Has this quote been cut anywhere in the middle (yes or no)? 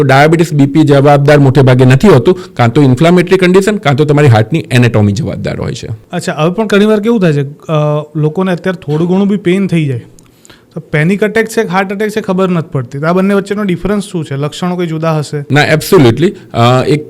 no